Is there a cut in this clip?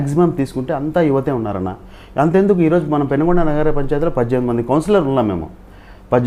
no; 0 cuts

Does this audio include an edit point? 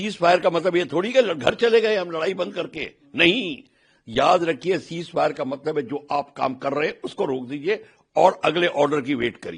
no; 0 cuts

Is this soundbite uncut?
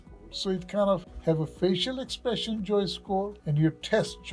no; 2 cuts; at 1.1 s, 3.4 s

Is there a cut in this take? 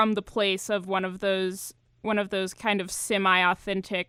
no; 0 cuts

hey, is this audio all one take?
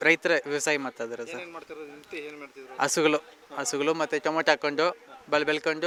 yes; 0 cuts

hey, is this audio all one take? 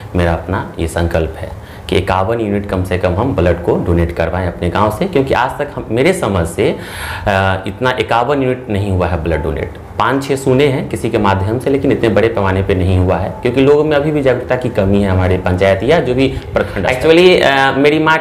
no; 1 cut; at 16.8 s

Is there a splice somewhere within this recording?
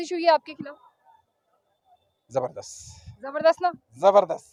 no; 0 cuts

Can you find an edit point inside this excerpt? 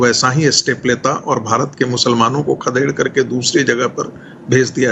no; 0 cuts

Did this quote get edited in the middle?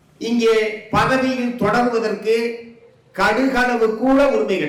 no; 0 cuts

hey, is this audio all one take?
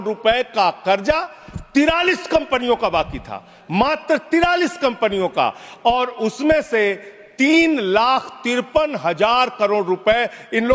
yes; 0 cuts

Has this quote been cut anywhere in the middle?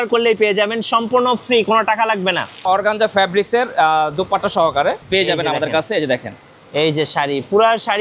yes; 1 cut; at 2.6 s

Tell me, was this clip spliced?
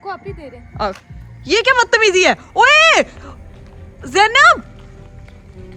no; 0 cuts

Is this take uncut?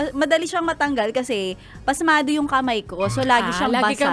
yes; 0 cuts

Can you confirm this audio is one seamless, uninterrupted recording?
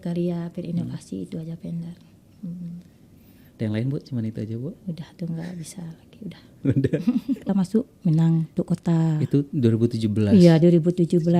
no; 1 cut; at 7.4 s

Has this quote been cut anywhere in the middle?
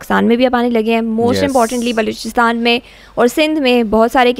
no; 0 cuts

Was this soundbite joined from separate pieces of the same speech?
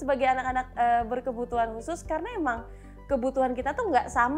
no; 0 cuts

